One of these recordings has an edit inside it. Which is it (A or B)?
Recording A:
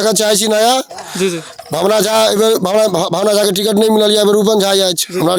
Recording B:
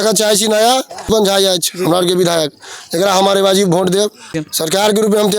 B